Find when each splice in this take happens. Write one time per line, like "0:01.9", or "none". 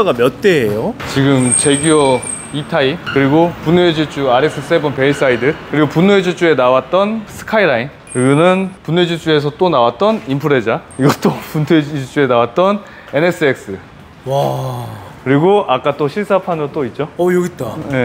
0:01.0